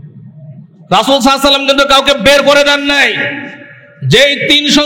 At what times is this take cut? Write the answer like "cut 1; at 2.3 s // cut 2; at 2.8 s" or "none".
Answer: none

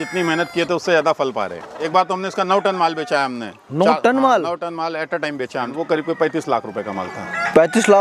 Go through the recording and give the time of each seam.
cut 1; at 1.5 s // cut 2; at 5.6 s

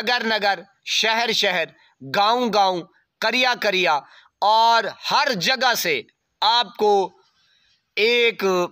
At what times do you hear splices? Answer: none

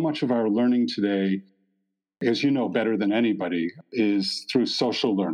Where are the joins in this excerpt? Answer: cut 1; at 3.8 s

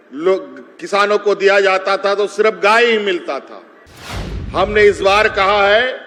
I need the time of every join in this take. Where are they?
none

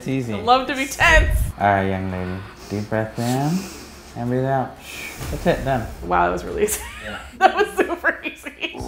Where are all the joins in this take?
none

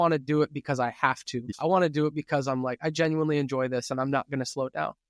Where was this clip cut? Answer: cut 1; at 1.5 s

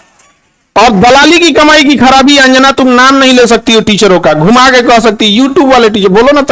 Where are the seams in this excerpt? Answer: none

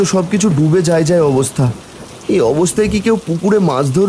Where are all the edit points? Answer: none

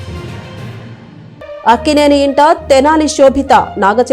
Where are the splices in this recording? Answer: cut 1; at 1.5 s

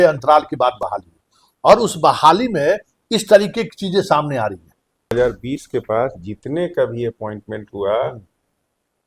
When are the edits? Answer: cut 1; at 5.1 s

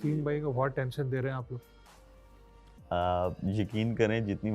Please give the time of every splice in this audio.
none

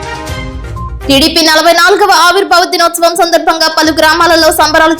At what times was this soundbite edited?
cut 1; at 1.0 s

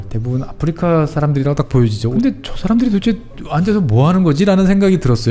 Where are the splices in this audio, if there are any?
cut 1; at 2.1 s

